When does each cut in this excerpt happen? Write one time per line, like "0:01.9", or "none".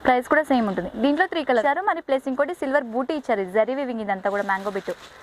0:01.6